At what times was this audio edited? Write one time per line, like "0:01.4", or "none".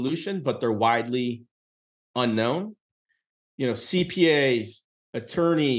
0:03.1

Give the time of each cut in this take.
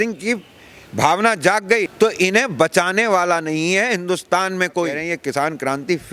0:01.9
0:05.0

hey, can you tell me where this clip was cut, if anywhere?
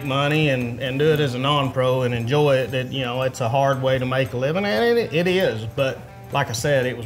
0:06.1

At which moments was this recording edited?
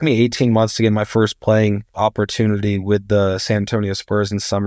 0:01.9

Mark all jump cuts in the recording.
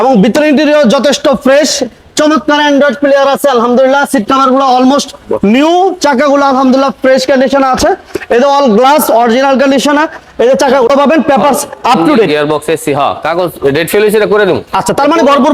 0:10.9

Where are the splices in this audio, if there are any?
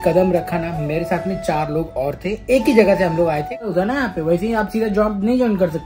0:03.7

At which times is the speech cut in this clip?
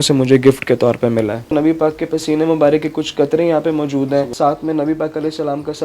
0:01.4
0:04.3

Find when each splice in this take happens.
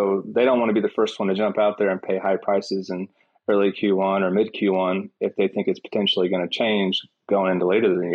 none

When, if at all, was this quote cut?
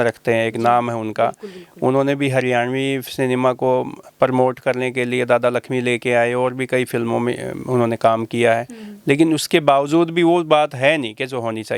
none

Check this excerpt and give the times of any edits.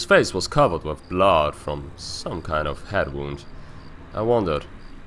0:02.4

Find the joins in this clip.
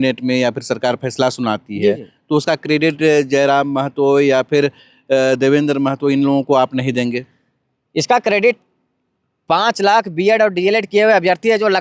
none

